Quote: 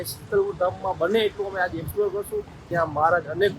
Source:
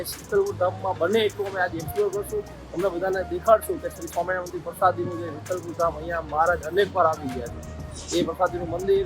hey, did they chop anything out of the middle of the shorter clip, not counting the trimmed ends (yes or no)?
yes